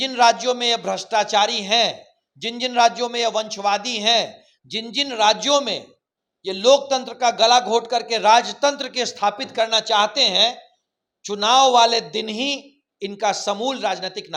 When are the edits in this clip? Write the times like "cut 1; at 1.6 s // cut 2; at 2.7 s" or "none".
none